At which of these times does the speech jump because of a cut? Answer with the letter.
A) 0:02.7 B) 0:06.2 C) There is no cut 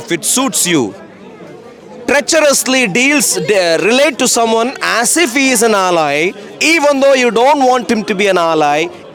C